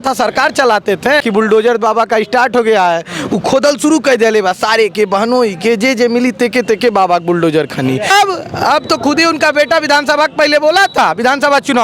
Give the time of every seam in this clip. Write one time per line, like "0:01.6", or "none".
0:01.2
0:08.1